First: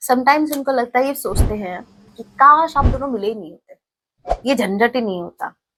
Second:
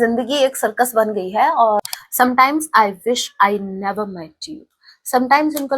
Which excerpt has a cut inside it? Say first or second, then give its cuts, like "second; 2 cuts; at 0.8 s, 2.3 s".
second; 1 cut; at 1.8 s